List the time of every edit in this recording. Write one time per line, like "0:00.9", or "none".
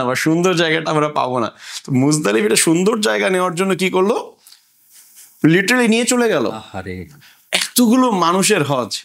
none